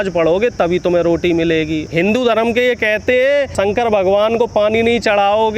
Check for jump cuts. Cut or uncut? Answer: cut